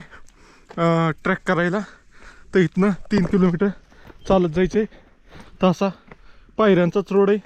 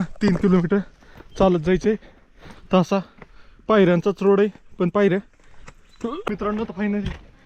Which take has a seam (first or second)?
second